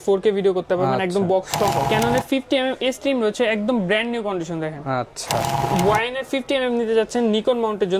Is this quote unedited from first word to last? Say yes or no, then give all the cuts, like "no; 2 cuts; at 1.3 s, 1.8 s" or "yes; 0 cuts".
no; 2 cuts; at 1.9 s, 5.7 s